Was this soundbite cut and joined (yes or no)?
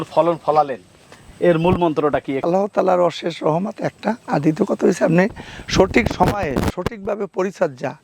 no